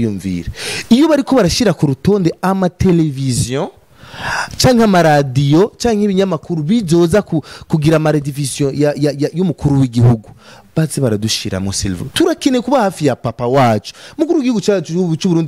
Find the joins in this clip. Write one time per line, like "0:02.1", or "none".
none